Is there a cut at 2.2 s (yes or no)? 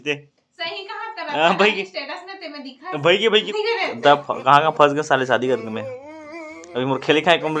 no